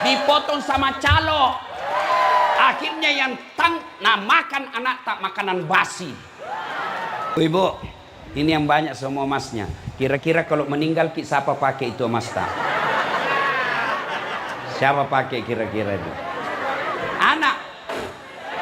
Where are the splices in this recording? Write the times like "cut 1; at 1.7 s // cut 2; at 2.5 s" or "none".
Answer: cut 1; at 7.3 s